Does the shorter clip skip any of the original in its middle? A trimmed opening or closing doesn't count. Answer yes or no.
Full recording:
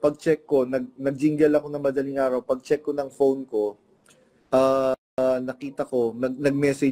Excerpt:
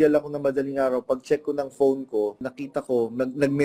yes